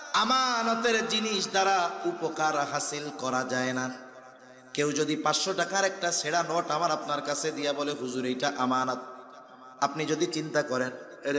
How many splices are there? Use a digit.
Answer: 0